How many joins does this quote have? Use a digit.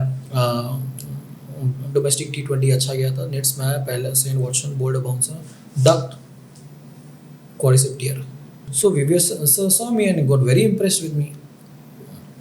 1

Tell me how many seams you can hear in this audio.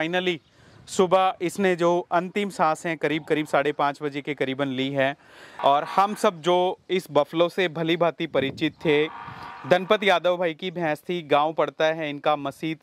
1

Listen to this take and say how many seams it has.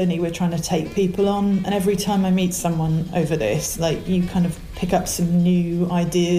0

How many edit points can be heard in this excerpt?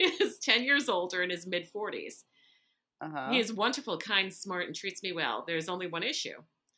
0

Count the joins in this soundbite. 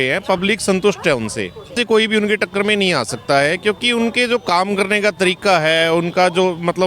1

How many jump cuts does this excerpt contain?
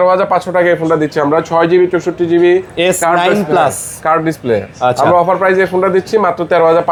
0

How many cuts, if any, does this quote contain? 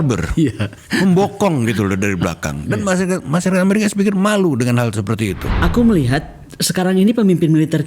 1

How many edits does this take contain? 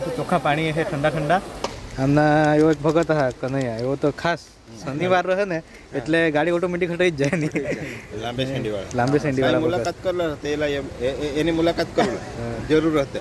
1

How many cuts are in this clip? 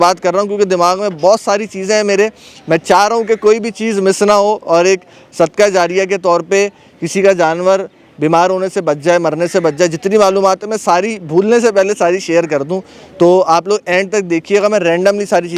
0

